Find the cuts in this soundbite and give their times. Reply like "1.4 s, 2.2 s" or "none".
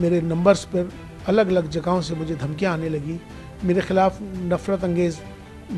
none